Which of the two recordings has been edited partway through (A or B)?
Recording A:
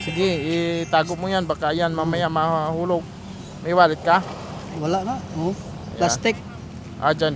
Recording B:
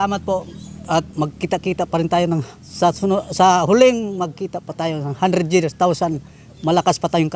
B